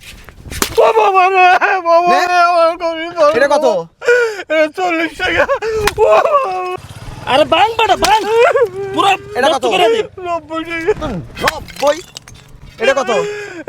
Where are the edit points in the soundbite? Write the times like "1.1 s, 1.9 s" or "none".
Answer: 6.7 s